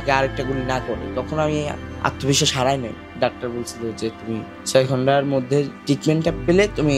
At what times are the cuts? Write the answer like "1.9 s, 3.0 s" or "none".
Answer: 1.8 s, 3.1 s, 4.6 s, 5.8 s